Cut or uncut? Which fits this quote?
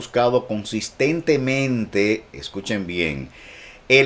uncut